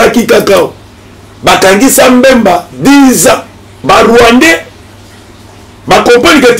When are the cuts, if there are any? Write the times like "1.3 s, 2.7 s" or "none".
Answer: 3.8 s